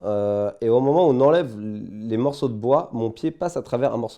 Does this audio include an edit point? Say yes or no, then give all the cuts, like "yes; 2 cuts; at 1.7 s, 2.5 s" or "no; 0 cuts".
no; 0 cuts